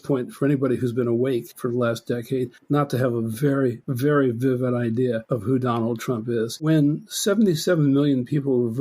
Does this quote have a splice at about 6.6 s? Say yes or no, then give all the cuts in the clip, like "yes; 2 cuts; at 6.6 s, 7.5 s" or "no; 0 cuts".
yes; 3 cuts; at 3.8 s, 5.2 s, 6.6 s